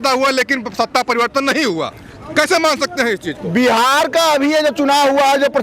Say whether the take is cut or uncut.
uncut